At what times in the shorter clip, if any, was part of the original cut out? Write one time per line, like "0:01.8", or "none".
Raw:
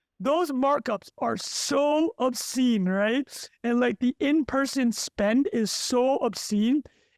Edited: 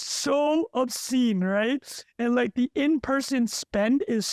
none